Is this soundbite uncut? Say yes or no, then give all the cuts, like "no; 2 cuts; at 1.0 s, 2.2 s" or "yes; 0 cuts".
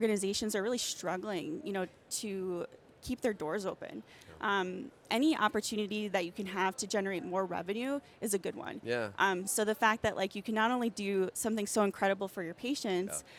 yes; 0 cuts